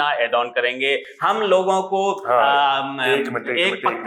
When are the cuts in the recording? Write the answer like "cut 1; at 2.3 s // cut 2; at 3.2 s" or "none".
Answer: none